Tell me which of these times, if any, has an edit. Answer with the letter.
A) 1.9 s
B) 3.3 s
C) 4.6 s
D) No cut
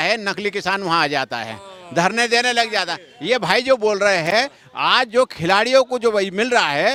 D